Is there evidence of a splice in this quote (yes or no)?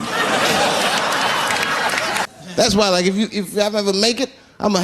yes